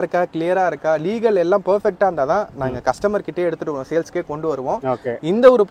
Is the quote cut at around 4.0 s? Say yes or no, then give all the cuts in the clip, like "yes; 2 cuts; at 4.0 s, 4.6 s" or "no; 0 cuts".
no; 0 cuts